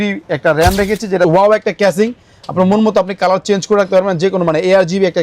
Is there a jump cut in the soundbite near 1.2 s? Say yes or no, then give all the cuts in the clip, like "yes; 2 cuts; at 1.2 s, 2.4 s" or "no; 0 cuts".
yes; 1 cut; at 1.2 s